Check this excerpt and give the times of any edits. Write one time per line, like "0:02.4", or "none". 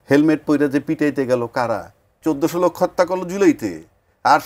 0:02.1